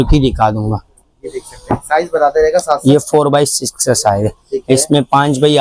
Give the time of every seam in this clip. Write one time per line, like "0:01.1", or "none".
none